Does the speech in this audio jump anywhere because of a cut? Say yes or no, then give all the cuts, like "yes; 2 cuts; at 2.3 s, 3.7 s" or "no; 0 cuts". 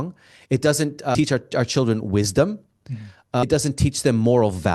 yes; 1 cut; at 3.4 s